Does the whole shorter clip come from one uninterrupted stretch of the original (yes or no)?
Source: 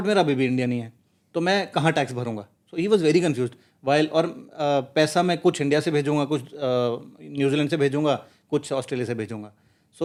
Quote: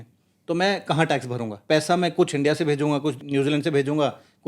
no